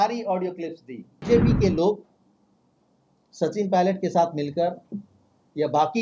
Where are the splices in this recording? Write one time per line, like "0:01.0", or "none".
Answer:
0:01.1